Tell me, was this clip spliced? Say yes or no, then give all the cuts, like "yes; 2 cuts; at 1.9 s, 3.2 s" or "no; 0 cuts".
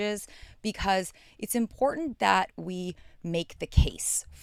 no; 0 cuts